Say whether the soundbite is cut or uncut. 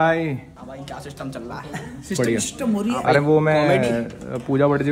uncut